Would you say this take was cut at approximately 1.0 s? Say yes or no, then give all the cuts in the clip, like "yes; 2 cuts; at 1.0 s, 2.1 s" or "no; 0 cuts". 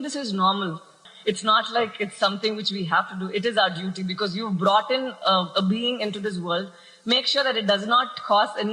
yes; 1 cut; at 1.0 s